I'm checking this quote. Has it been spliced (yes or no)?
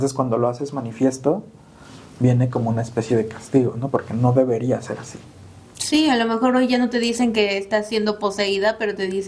no